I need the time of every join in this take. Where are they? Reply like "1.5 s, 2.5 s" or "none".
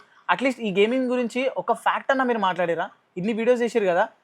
none